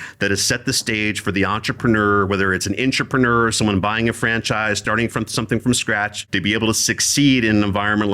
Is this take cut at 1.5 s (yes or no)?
no